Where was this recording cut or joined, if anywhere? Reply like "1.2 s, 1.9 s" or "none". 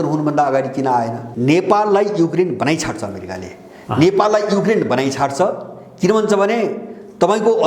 1.2 s

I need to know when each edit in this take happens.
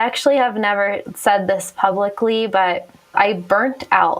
3.1 s

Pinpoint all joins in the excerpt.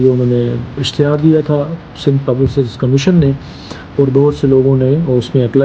none

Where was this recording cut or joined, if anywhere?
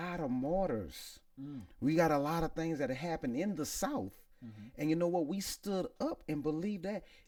none

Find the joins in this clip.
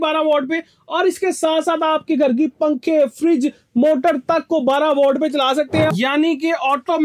5.9 s

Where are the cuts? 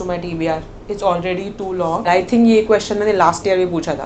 2.0 s

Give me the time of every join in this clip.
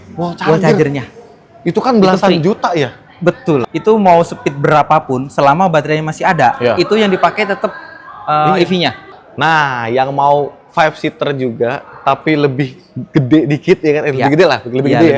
3.6 s, 9.0 s

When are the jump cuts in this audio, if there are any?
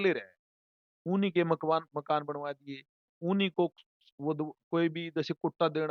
none

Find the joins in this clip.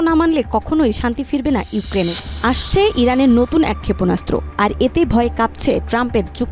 2.2 s

